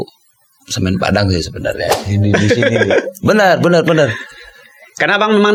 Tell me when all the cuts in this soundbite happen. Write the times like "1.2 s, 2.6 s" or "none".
none